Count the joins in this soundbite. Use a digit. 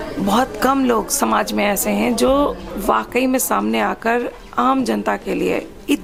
0